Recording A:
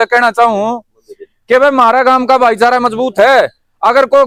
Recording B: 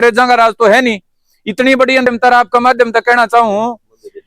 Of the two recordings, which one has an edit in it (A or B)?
B